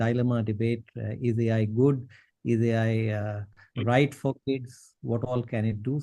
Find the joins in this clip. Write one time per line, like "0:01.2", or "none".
0:04.1